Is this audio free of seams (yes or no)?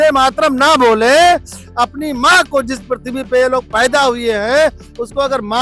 yes